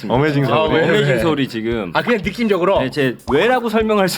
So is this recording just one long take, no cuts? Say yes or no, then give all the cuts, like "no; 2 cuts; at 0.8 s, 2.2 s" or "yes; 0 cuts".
no; 1 cut; at 3.2 s